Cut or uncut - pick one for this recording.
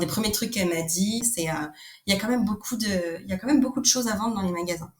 cut